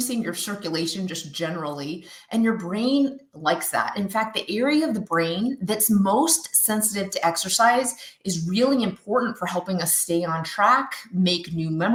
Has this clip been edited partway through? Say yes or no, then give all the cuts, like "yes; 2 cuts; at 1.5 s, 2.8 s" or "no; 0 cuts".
no; 0 cuts